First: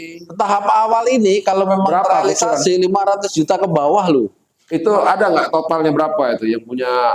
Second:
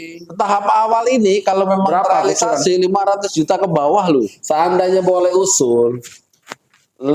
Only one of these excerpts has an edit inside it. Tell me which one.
second; 1 cut; at 4.4 s

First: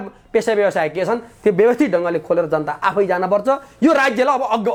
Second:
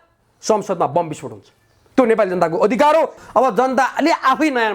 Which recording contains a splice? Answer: second; 1 cut; at 3.1 s

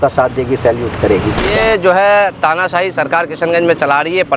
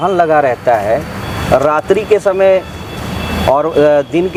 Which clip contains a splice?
first; 1 cut; at 1.4 s

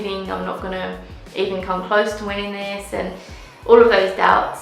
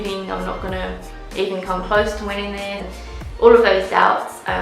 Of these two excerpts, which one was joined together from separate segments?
second; 1 cut; at 2.9 s

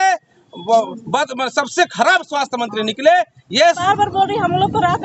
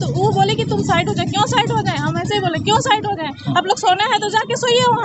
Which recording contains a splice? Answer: first; 1 cut; at 3.8 s

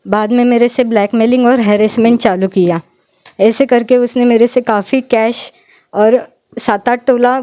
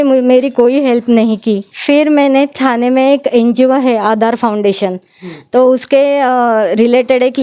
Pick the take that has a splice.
second; 1 cut; at 1.7 s

